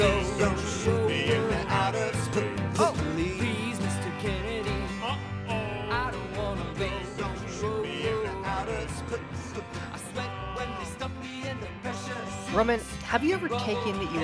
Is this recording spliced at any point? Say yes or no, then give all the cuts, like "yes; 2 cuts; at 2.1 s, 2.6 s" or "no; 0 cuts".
no; 0 cuts